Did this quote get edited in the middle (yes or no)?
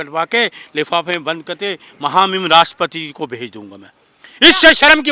no